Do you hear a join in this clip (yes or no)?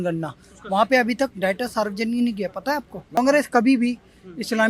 yes